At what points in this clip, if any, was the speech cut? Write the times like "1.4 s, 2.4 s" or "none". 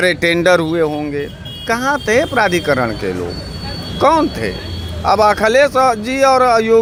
none